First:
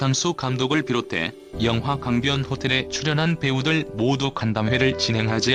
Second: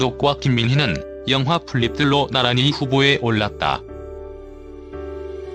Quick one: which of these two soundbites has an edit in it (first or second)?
second